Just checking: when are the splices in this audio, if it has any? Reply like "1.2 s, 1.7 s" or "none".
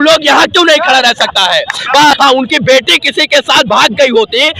2.1 s